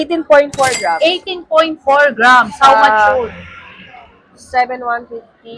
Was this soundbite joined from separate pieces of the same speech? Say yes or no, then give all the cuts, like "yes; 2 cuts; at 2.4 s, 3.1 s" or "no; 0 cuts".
no; 0 cuts